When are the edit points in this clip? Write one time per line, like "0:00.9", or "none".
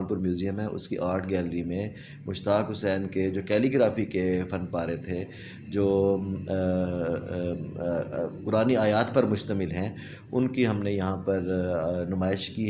0:09.6